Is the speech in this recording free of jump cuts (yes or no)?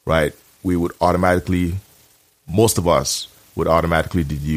yes